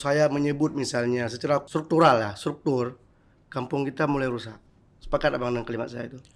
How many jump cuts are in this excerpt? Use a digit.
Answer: 1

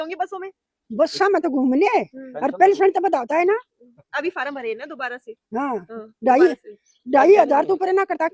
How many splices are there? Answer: 0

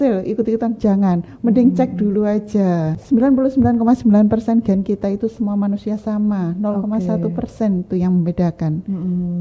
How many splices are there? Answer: 1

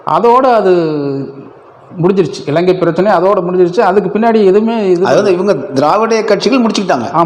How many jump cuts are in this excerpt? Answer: 0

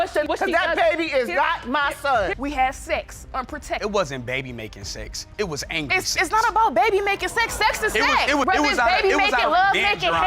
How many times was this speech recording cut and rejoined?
1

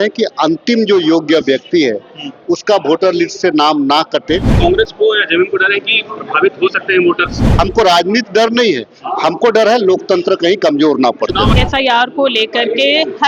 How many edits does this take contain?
3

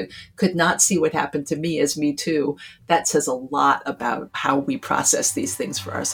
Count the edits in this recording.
1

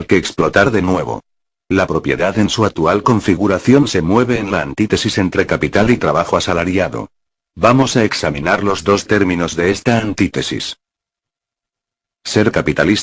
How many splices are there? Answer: 1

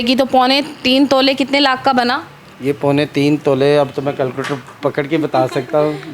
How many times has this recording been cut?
0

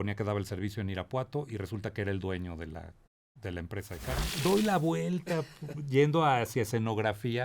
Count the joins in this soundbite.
1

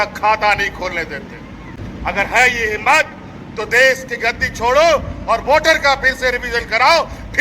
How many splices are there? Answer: 1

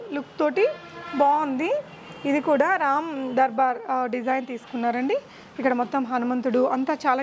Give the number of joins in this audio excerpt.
0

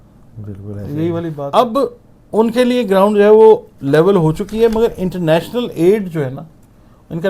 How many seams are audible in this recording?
1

